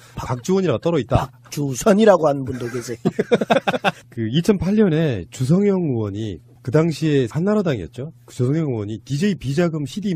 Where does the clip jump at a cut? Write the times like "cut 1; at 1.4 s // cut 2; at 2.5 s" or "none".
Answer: none